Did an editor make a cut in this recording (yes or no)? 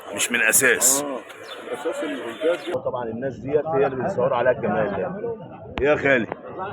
yes